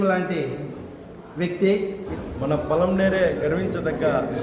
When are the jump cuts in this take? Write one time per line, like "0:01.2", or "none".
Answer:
0:02.1